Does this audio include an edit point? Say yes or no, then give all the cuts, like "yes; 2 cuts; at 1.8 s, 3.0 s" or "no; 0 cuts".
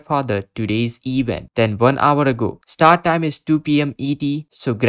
no; 0 cuts